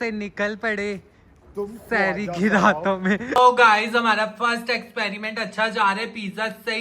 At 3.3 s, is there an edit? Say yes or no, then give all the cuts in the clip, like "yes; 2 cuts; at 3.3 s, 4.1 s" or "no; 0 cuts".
yes; 1 cut; at 3.3 s